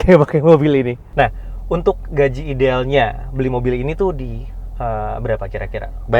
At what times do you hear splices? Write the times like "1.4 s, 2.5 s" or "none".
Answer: 1.0 s